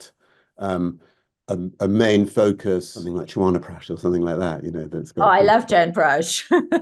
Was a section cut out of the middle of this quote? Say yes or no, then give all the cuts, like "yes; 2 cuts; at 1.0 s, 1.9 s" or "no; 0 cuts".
yes; 1 cut; at 3.0 s